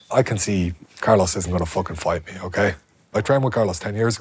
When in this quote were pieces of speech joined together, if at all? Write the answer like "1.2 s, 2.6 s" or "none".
3.1 s